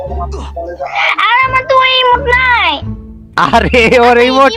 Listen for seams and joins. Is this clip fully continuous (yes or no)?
yes